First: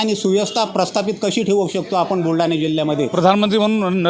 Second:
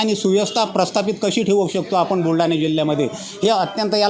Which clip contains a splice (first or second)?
first